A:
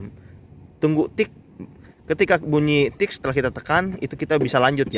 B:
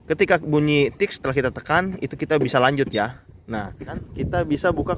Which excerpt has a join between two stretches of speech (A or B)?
B